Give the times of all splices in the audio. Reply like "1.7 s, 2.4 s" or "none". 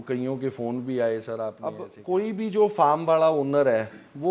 1.9 s